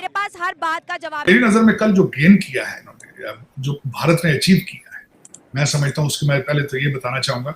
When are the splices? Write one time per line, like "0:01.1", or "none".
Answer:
0:01.3